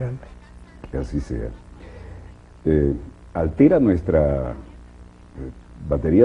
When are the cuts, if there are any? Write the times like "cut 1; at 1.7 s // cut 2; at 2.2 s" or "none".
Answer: cut 1; at 2.6 s